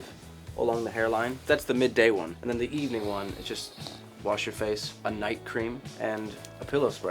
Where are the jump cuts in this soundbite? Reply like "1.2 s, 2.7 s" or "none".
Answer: 1.4 s, 2.3 s, 4.9 s, 6.0 s